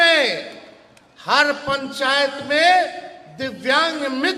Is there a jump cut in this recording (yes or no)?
no